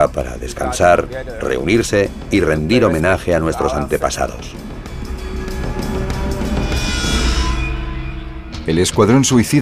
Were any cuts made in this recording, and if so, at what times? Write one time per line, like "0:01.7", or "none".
none